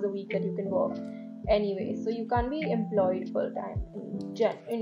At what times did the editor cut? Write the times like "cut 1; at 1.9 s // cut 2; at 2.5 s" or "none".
none